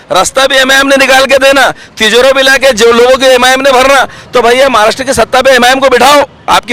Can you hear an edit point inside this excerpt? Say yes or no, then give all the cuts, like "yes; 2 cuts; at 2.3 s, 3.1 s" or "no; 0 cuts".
no; 0 cuts